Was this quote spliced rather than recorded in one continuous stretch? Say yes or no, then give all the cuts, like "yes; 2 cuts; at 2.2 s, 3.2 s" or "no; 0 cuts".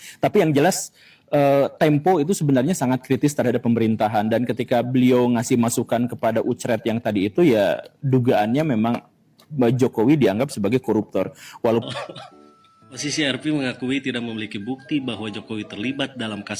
yes; 1 cut; at 11.8 s